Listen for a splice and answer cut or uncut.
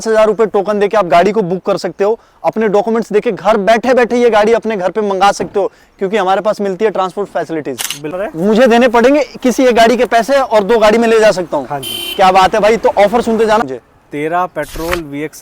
cut